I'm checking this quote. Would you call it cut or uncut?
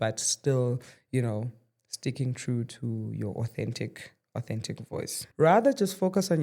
cut